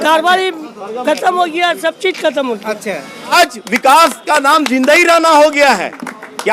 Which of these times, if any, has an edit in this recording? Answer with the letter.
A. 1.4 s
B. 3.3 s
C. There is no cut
B